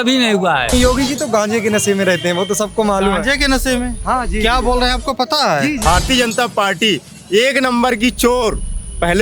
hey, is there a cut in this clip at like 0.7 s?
yes; 2 cuts; at 0.7 s, 5.8 s

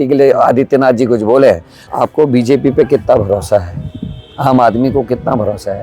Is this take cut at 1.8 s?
yes; 1 cut; at 1.8 s

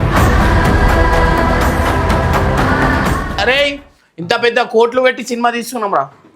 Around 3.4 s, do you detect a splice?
yes; 1 cut; at 3.4 s

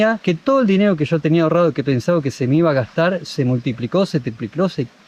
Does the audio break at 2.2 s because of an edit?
no; 0 cuts

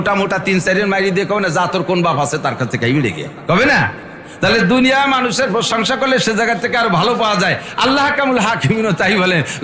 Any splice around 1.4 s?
no; 1 cut; at 3.3 s

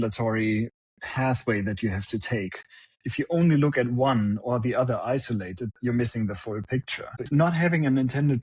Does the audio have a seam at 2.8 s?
no; 2 cuts; at 5.8 s, 7.3 s

